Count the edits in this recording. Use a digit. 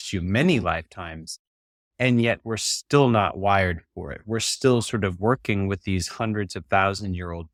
0